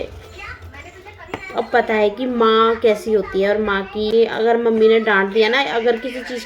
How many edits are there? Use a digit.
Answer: 1